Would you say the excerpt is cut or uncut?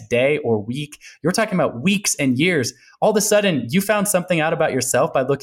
uncut